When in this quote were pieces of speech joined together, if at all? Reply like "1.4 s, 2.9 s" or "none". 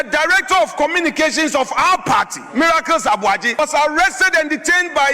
3.6 s